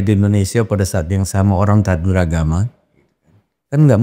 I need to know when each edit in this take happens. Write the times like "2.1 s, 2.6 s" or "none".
none

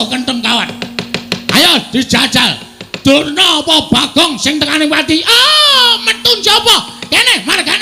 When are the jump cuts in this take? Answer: 5.3 s

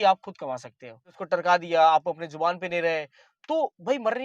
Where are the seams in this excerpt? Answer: 1.1 s

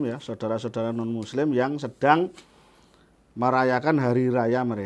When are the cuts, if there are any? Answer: none

